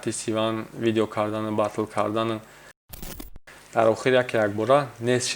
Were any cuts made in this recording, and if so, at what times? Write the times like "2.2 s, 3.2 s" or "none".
3.2 s

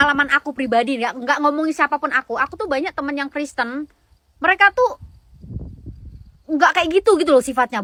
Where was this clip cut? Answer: none

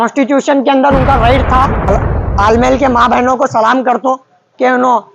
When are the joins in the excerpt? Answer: 1.9 s

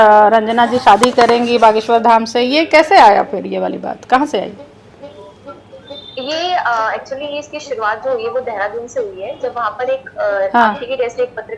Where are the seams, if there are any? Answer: none

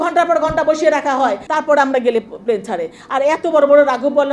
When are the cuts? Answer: 1.4 s

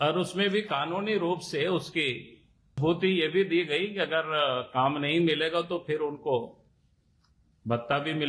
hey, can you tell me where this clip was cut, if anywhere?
2.7 s

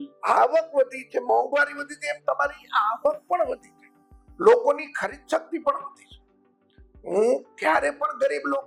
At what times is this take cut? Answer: none

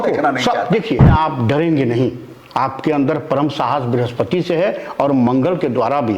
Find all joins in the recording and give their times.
1.1 s

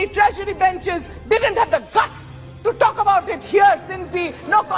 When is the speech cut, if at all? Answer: none

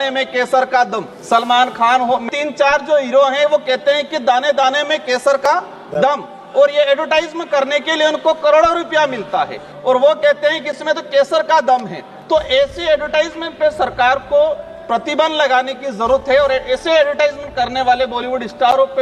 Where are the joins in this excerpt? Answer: 1.1 s, 2.3 s, 9.7 s

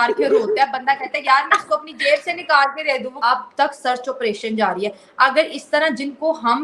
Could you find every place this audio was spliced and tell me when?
3.2 s

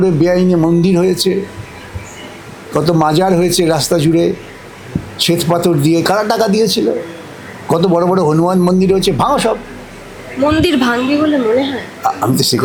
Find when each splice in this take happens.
none

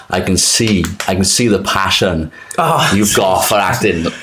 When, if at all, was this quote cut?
none

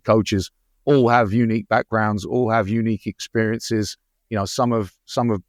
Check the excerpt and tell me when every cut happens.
none

